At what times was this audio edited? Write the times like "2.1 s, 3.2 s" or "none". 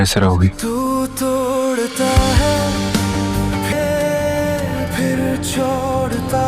2.3 s